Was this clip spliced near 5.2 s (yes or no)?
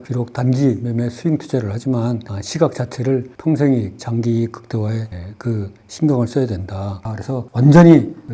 no